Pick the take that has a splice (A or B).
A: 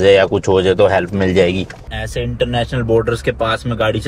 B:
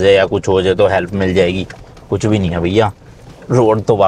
A